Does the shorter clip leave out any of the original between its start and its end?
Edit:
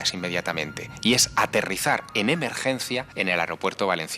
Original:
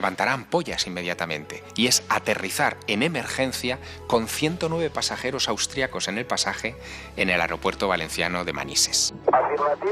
yes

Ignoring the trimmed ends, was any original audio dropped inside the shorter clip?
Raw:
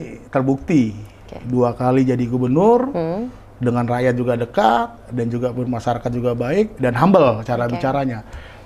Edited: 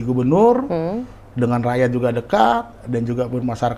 no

